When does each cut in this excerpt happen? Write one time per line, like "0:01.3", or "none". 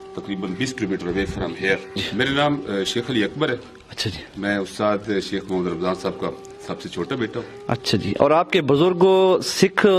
0:02.0

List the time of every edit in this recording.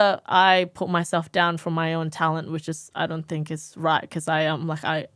none

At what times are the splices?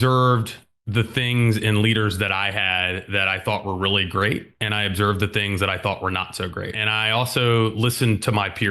none

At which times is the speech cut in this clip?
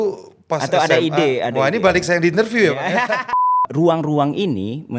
0:03.3

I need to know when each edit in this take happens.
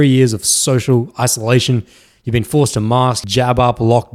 0:03.2

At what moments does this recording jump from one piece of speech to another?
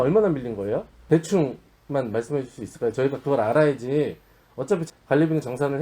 0:00.9
0:04.8

